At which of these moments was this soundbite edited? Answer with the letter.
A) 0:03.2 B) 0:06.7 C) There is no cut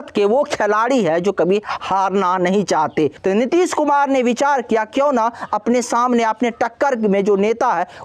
A